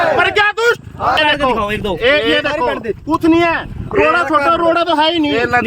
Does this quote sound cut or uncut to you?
cut